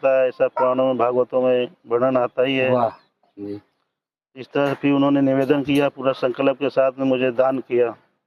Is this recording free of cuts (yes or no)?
yes